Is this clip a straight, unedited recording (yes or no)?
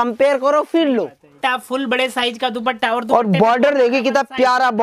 no